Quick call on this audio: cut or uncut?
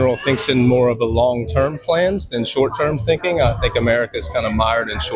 uncut